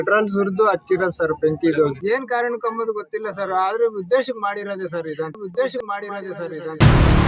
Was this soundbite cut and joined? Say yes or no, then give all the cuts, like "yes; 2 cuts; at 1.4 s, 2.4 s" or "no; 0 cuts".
yes; 2 cuts; at 2.0 s, 5.3 s